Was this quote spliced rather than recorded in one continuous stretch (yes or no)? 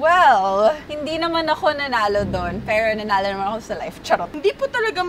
yes